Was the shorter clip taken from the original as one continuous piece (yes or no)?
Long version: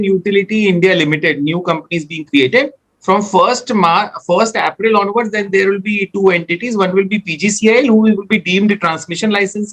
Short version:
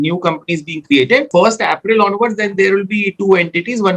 no